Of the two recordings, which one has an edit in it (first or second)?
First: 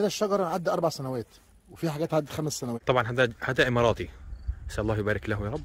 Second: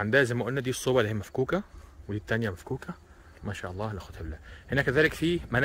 first